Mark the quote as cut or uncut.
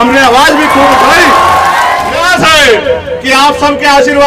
cut